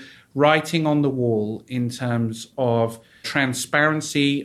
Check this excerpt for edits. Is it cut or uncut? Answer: cut